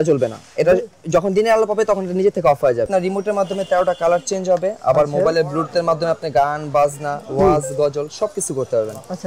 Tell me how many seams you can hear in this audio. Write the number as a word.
one